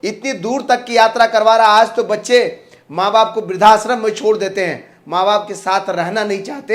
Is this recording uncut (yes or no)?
yes